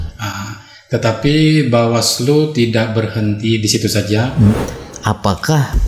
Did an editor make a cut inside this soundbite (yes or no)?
yes